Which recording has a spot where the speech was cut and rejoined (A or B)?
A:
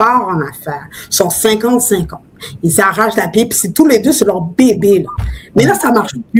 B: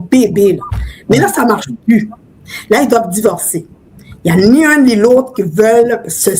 B